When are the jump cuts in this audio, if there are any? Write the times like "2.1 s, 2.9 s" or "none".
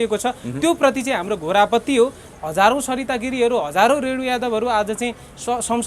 2.3 s

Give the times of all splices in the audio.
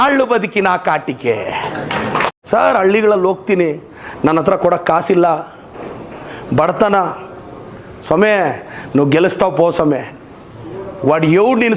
2.3 s

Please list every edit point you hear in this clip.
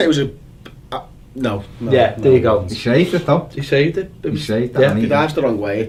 none

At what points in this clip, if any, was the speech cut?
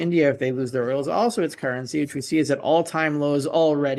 none

